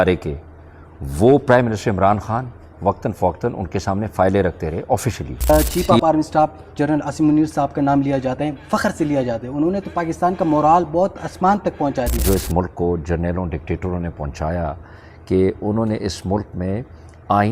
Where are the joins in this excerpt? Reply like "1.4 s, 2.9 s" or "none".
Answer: 5.5 s, 12.2 s